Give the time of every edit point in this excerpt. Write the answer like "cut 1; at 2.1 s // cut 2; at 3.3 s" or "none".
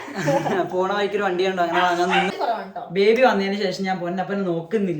cut 1; at 2.3 s